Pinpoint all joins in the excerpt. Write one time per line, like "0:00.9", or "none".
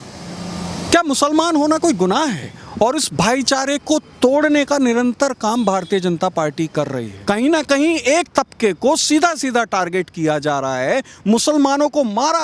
0:02.6
0:07.1